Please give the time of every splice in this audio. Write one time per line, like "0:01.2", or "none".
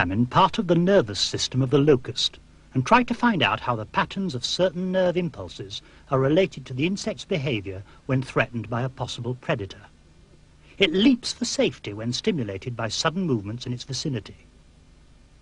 0:03.4